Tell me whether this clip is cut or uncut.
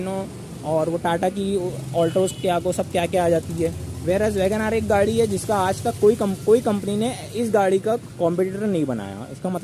uncut